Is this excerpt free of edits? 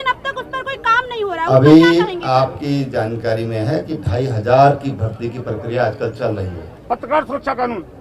no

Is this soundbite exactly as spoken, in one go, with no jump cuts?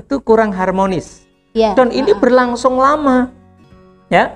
yes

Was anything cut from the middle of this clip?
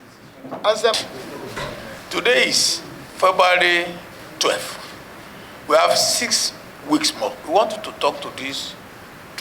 yes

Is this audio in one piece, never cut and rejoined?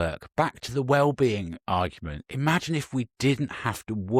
yes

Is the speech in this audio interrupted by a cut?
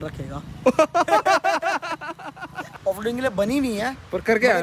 yes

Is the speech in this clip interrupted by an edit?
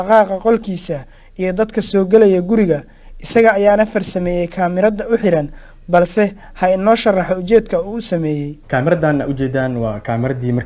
no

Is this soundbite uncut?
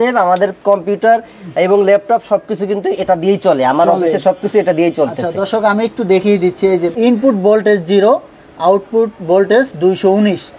yes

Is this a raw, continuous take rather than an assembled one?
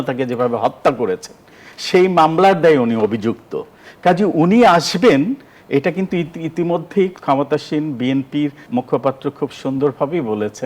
no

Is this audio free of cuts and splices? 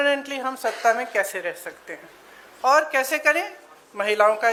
yes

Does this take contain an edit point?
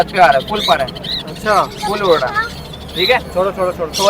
no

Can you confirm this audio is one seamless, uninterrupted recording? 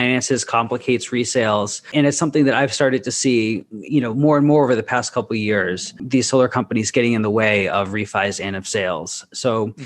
no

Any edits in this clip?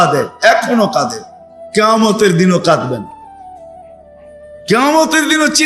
yes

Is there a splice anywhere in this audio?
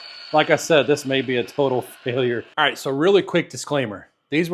yes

